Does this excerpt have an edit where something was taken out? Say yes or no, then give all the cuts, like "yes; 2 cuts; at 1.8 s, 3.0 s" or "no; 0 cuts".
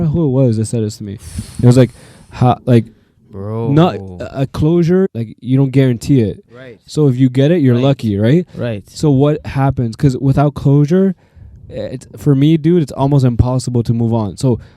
yes; 1 cut; at 5.1 s